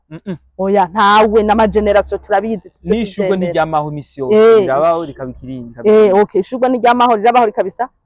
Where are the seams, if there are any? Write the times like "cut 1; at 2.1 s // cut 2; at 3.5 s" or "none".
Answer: none